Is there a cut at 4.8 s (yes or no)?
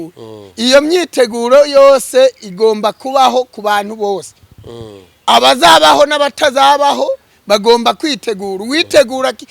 no